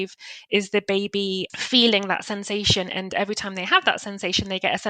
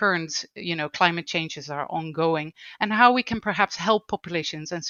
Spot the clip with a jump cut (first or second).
first